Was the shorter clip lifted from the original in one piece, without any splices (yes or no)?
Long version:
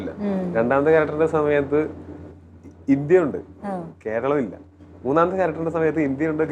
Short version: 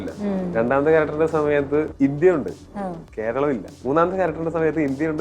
no